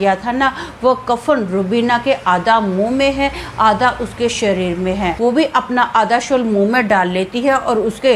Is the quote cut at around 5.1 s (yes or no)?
yes